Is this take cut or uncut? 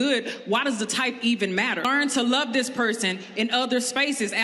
cut